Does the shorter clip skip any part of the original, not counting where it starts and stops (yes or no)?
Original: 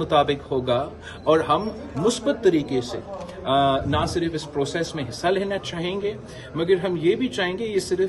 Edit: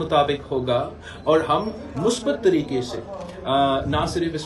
no